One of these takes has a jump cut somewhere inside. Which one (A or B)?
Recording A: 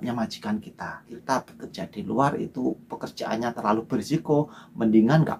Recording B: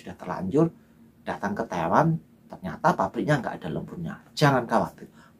A